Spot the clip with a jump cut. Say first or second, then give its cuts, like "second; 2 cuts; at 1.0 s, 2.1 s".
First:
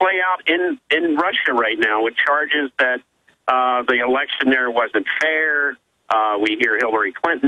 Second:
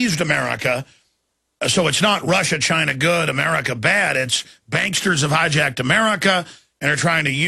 second; 1 cut; at 6.0 s